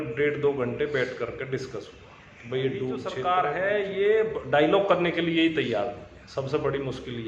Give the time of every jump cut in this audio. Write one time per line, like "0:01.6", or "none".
0:03.2